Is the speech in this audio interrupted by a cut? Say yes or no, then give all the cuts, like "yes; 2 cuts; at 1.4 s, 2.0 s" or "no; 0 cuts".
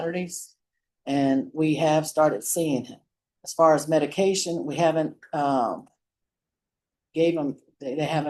no; 0 cuts